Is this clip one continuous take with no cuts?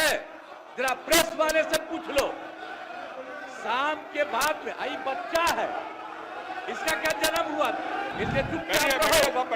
no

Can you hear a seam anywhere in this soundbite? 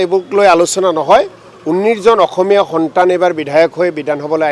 no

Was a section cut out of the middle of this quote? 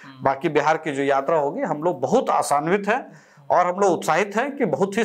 no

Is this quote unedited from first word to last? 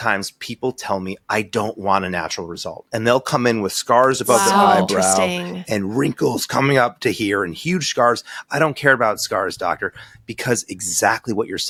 yes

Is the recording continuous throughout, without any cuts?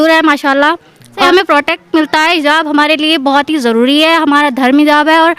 no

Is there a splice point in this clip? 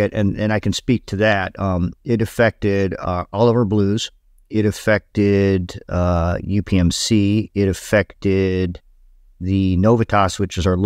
no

